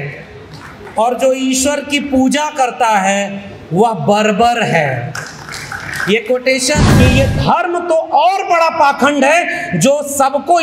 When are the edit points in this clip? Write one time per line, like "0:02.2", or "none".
0:06.8